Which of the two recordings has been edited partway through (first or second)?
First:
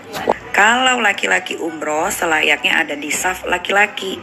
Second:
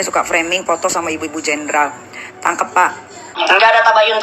second